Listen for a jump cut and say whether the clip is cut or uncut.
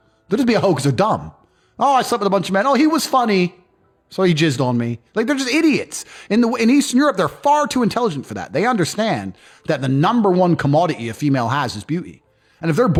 uncut